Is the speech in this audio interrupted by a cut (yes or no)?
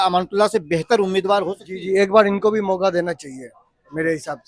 no